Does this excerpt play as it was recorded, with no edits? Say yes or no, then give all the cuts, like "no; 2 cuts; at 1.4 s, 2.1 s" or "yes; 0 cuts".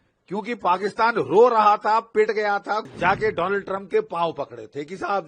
no; 1 cut; at 2.8 s